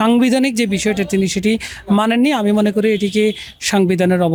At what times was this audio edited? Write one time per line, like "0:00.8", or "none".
none